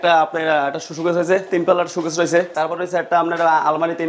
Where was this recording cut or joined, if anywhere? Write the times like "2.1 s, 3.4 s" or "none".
2.5 s